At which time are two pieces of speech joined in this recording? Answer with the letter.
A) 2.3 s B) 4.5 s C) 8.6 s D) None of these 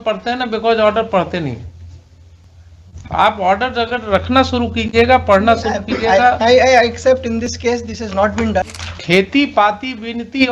C